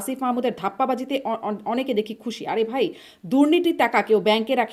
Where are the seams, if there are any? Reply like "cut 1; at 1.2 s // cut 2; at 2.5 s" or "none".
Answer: none